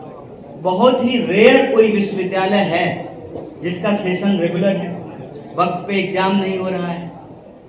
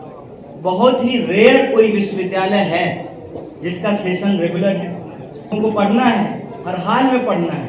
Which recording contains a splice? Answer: second; 1 cut; at 5.5 s

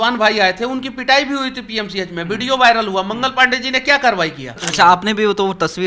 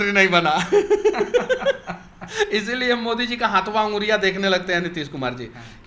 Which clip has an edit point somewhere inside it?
first; 1 cut; at 4.6 s

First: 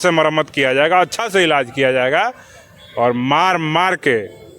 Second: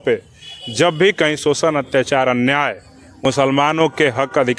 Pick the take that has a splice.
second; 1 cut; at 3.2 s

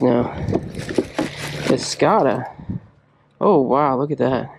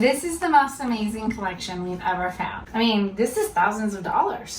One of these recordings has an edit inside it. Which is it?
second; 1 cut; at 2.6 s

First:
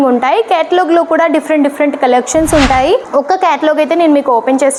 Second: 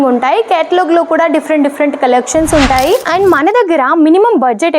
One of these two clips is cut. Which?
second; 1 cut; at 3.1 s

